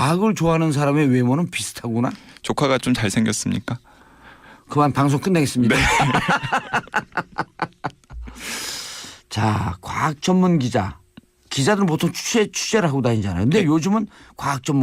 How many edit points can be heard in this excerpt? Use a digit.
1